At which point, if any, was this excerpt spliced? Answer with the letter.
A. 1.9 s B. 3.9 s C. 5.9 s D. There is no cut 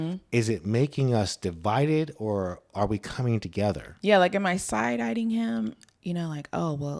C